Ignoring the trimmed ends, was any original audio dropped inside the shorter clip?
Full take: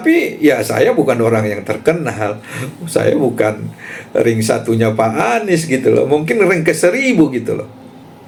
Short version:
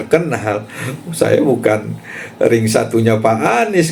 no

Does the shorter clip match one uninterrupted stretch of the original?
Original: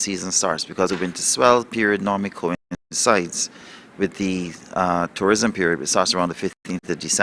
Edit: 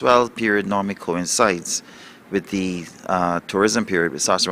no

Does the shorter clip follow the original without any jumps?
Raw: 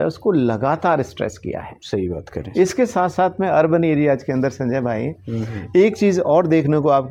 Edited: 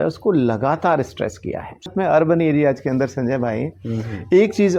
no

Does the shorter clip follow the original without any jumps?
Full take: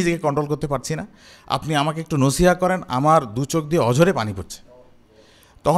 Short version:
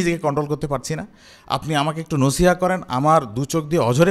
yes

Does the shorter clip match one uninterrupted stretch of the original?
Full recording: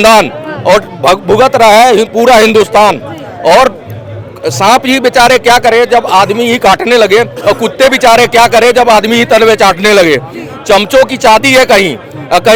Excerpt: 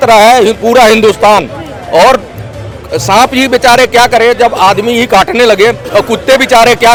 yes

